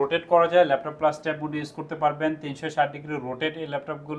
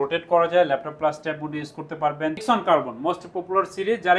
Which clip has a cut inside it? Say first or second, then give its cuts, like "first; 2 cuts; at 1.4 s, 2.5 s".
second; 1 cut; at 2.4 s